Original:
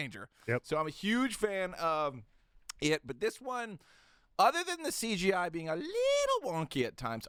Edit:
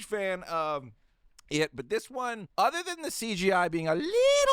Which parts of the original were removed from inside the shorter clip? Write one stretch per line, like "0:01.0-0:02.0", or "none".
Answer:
0:03.7-0:04.2